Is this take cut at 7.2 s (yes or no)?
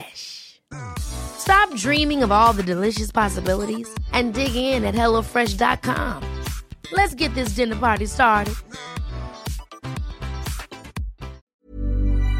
no